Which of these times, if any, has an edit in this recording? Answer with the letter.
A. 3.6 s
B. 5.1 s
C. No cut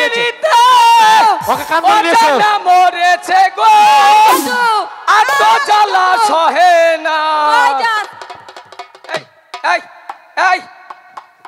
C